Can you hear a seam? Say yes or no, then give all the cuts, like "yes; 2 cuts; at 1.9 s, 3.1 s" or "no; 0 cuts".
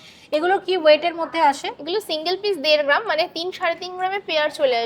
no; 0 cuts